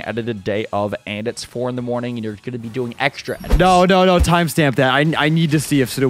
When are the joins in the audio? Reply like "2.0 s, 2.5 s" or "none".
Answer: none